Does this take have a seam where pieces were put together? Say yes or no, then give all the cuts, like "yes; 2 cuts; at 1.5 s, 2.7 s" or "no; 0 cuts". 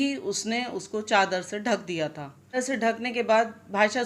yes; 1 cut; at 2.6 s